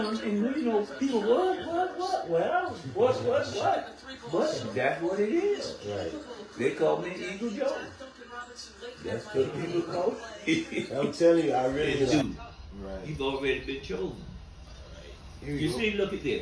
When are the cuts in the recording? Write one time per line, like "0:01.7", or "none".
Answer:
0:12.1